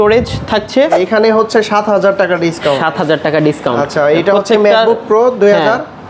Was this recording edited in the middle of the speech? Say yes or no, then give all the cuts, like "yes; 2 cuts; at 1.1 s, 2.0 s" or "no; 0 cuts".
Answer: yes; 1 cut; at 1.0 s